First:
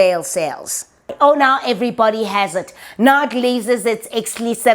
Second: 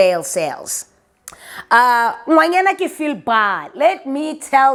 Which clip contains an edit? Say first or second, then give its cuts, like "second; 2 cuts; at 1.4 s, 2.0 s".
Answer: first; 1 cut; at 1.1 s